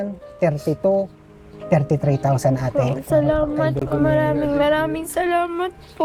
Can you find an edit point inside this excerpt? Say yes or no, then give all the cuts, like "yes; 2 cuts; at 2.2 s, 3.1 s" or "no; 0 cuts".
no; 0 cuts